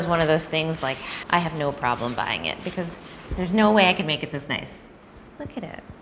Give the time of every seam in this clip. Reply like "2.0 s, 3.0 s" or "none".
none